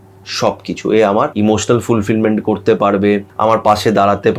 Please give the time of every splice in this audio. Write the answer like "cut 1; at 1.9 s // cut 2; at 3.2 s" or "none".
cut 1; at 1.3 s // cut 2; at 3.3 s